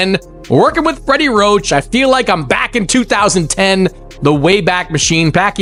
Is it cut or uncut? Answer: uncut